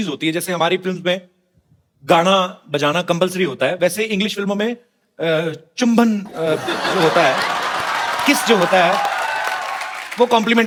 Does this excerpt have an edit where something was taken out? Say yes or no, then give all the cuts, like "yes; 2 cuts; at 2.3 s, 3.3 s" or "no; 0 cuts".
no; 0 cuts